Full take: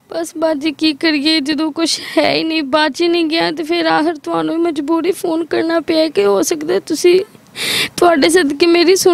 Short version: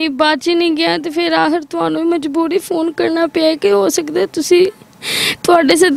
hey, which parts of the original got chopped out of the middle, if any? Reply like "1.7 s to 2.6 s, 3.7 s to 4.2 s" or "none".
none